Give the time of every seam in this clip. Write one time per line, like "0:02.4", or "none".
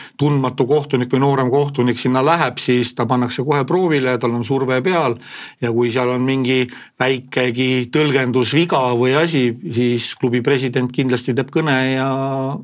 none